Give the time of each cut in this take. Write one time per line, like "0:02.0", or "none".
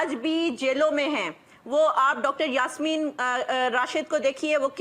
none